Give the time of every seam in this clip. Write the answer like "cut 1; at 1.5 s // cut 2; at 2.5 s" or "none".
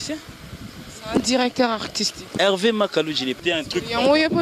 cut 1; at 3.4 s

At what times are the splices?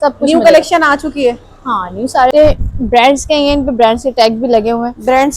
cut 1; at 2.3 s

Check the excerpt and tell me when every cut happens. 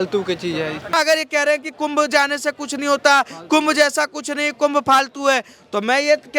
cut 1; at 0.9 s

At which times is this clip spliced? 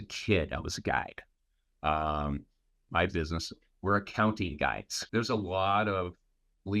cut 1; at 2.9 s // cut 2; at 4.9 s

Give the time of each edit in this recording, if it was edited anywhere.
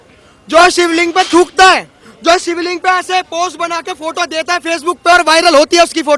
none

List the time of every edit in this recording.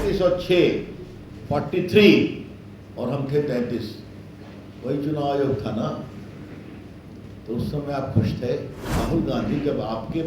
cut 1; at 9.0 s

